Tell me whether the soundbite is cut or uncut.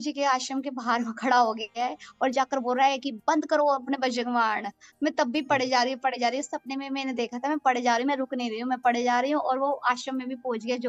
uncut